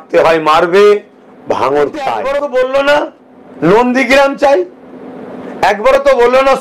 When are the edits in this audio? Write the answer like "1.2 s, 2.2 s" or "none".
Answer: 2.2 s